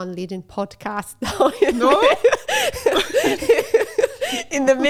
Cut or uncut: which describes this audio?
uncut